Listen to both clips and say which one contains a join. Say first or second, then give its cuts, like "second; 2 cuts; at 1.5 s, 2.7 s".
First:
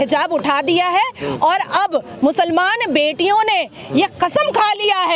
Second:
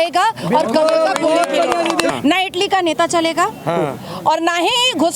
second; 1 cut; at 2.1 s